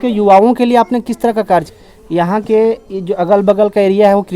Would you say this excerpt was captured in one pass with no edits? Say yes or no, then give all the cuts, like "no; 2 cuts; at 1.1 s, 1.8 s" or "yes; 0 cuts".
no; 1 cut; at 1.8 s